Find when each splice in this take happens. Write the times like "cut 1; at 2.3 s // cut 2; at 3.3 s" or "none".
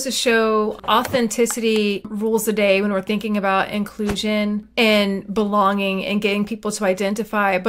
cut 1; at 0.8 s // cut 2; at 2.1 s // cut 3; at 4.7 s